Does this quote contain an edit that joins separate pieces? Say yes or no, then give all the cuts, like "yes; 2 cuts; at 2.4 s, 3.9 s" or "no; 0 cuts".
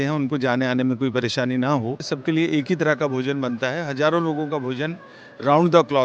yes; 1 cut; at 2.1 s